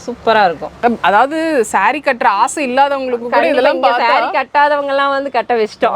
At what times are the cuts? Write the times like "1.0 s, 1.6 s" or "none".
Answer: none

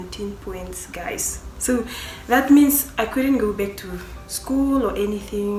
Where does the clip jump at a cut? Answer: none

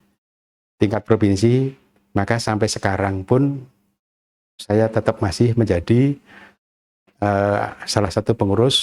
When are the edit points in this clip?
none

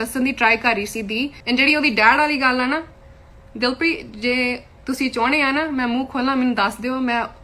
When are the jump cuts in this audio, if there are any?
1.4 s

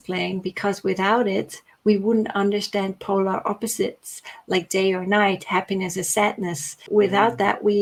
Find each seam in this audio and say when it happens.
none

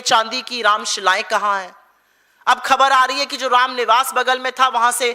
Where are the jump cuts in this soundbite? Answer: none

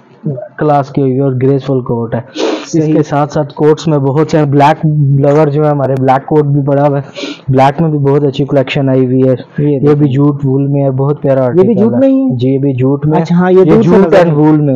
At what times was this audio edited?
none

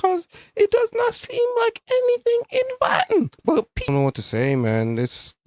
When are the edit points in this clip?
3.9 s

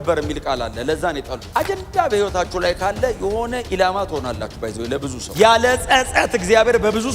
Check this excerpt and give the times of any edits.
1.4 s, 5.2 s

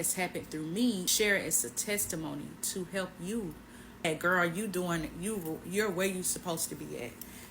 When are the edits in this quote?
1.1 s, 4.0 s

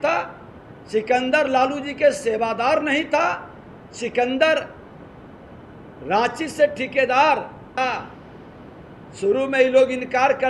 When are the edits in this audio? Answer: 7.7 s

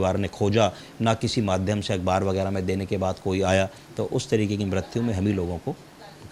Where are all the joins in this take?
none

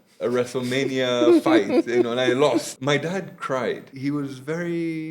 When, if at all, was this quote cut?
2.7 s, 3.9 s

